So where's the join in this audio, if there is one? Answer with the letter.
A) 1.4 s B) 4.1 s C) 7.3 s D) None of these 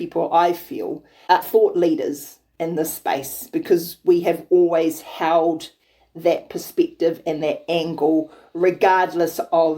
A